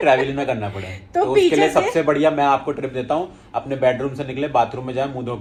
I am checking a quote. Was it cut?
no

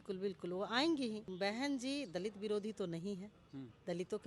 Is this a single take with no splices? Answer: no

